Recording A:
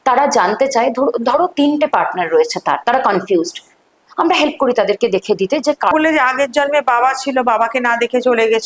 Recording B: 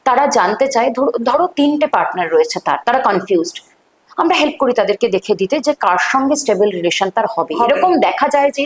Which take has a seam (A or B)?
A